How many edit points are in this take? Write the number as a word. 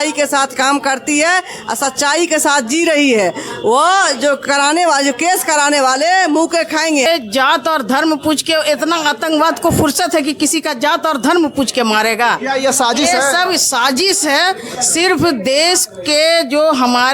one